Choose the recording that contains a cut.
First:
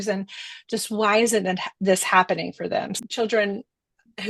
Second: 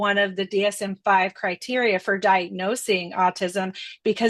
first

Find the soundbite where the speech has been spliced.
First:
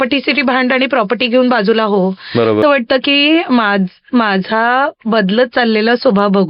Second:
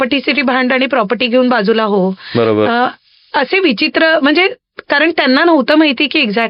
first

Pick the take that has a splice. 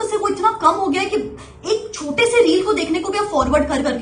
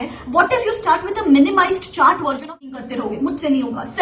second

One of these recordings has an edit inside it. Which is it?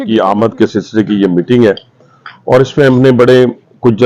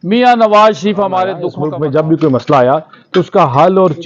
second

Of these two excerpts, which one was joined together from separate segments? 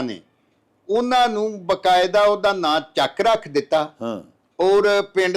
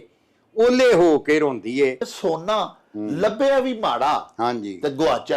second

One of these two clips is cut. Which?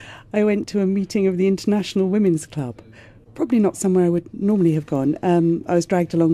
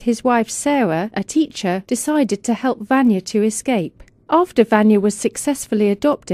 first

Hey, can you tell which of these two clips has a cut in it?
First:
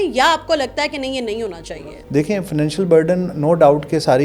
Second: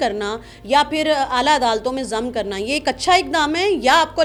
first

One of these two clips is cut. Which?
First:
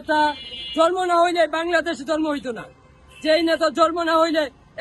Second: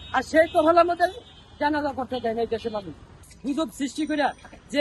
second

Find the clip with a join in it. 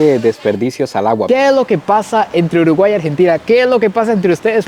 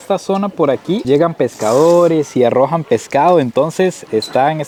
first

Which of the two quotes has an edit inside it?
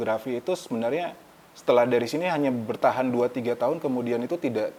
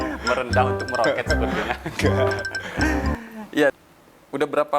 second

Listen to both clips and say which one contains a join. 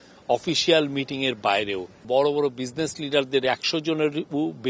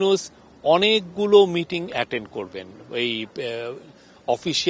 first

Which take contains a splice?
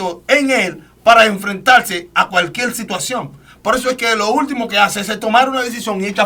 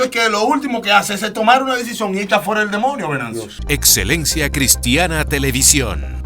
second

